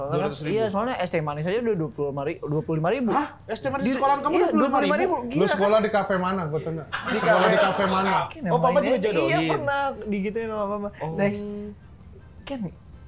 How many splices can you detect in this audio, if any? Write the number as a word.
one